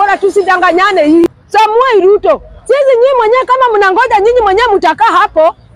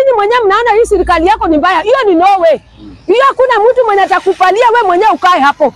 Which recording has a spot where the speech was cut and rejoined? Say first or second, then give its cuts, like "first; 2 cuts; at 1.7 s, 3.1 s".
first; 1 cut; at 1.4 s